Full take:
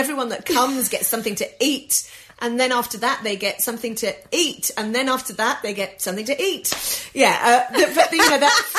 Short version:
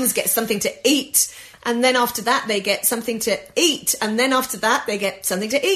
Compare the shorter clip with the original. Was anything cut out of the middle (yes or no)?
no